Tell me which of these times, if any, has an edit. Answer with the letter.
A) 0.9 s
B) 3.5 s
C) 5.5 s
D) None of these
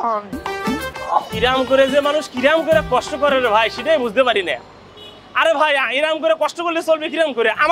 A